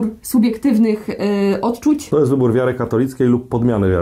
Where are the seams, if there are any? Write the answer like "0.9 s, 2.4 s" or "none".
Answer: 2.0 s